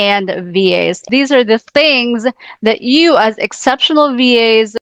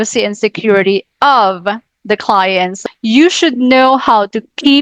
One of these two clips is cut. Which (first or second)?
second